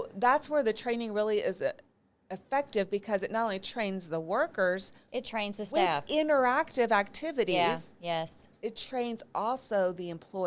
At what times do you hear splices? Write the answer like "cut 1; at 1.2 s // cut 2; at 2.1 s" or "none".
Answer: none